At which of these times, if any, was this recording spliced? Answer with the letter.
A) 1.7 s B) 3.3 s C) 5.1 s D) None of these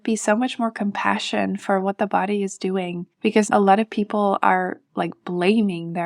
B